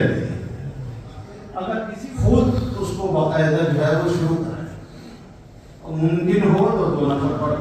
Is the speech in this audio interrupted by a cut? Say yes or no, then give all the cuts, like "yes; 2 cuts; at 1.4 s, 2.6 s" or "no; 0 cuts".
yes; 1 cut; at 2.0 s